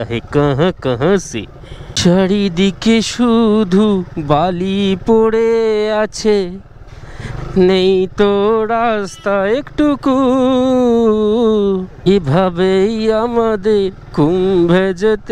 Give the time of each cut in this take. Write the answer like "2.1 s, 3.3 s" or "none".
none